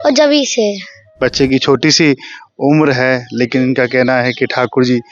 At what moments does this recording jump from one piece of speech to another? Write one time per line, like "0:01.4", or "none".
0:01.0

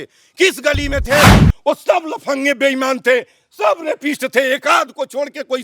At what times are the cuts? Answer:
0:01.4

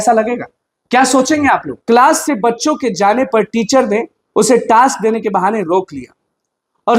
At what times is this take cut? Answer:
0:01.7

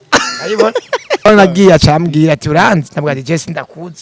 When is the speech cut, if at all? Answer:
0:01.3

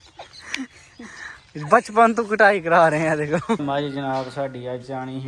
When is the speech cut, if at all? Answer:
0:03.6

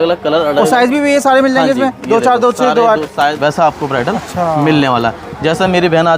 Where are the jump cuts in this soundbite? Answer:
0:03.4

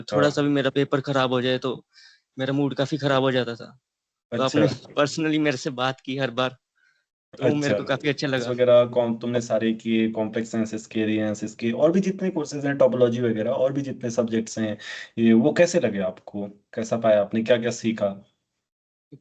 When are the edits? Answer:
0:08.5

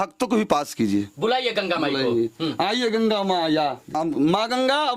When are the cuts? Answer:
0:04.0

